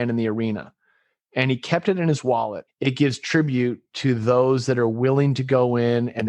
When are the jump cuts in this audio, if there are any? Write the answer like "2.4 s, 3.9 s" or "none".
2.6 s